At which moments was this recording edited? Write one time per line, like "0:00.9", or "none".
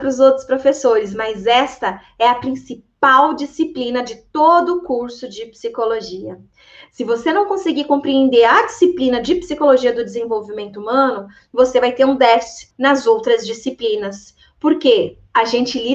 0:12.7